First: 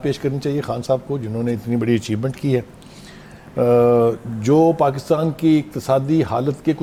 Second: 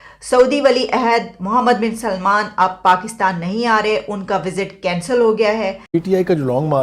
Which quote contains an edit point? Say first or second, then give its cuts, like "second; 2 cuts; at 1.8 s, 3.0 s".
second; 1 cut; at 5.9 s